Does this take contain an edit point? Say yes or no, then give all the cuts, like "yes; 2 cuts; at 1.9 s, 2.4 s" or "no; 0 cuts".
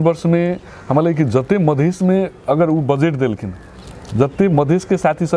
no; 0 cuts